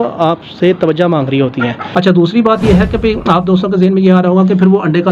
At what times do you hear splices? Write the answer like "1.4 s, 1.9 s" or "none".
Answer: 1.8 s